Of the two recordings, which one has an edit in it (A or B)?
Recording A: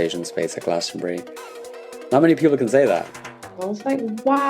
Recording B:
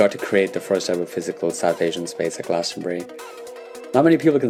A